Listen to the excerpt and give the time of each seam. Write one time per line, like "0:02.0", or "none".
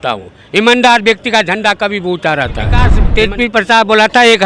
0:03.0